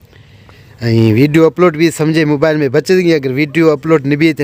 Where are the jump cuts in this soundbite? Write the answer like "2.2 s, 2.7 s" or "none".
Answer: none